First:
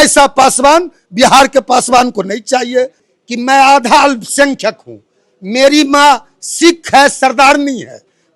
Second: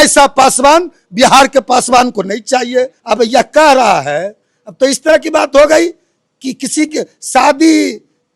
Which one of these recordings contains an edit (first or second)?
first